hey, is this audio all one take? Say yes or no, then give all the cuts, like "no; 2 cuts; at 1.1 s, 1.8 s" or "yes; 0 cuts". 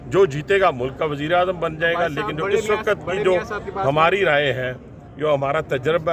yes; 0 cuts